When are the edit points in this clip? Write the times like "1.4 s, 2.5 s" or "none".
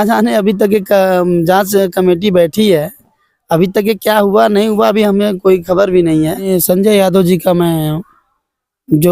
6.5 s